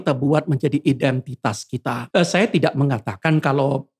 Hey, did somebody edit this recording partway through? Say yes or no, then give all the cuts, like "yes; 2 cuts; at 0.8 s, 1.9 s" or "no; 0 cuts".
yes; 1 cut; at 2.0 s